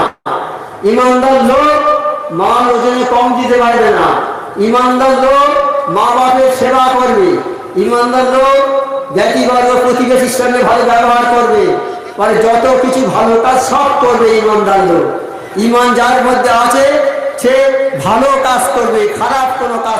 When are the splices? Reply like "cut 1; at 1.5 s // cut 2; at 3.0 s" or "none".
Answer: none